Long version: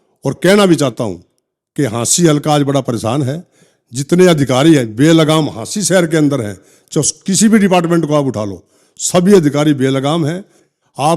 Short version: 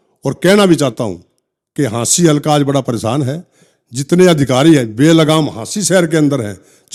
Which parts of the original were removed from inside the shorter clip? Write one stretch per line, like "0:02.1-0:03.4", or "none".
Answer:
none